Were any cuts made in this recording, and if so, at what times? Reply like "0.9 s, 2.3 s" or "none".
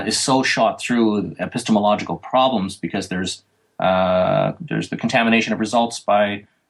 none